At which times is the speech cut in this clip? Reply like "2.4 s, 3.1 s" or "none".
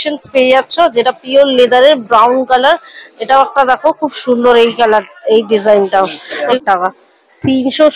6.5 s